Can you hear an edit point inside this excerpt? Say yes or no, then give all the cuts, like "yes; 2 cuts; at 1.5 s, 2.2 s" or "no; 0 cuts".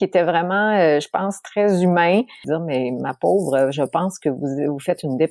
yes; 1 cut; at 2.4 s